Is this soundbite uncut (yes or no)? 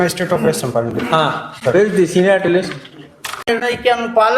no